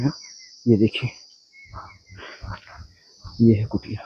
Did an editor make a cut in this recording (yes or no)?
no